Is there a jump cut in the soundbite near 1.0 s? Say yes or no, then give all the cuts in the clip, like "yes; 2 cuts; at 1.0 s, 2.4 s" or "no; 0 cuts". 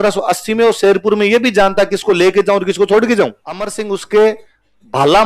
no; 1 cut; at 3.7 s